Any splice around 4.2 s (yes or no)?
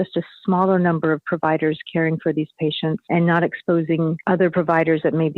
yes